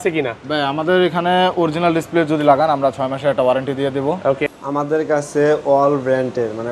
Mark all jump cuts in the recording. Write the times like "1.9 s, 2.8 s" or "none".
4.5 s